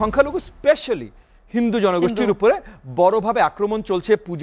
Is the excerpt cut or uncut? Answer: uncut